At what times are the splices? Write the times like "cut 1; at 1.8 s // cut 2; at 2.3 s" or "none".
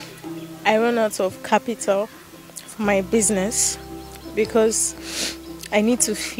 none